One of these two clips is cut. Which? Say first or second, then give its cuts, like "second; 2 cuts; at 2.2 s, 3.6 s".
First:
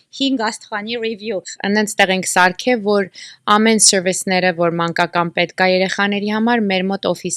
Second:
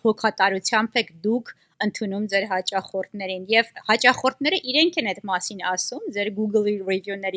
first; 1 cut; at 1.5 s